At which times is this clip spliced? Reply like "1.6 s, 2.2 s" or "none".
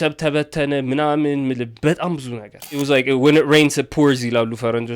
2.7 s